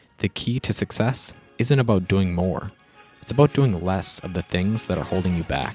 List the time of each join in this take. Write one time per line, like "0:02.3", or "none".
none